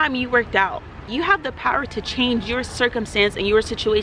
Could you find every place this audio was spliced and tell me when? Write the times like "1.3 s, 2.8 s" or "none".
1.0 s